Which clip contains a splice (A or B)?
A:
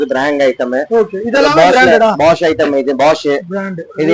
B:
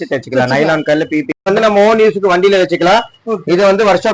B